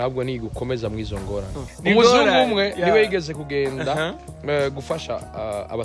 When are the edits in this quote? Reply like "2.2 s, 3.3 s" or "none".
1.6 s